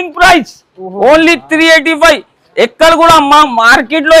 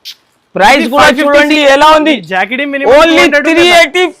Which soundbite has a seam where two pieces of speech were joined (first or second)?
second